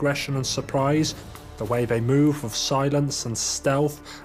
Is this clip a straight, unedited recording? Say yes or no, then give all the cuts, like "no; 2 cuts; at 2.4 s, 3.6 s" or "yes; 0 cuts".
no; 1 cut; at 1.3 s